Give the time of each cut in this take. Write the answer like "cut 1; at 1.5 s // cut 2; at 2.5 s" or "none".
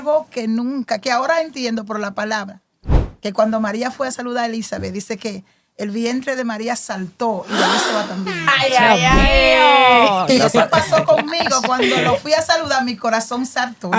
none